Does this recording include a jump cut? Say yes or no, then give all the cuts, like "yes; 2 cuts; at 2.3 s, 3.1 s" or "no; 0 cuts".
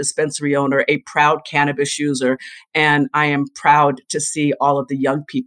no; 0 cuts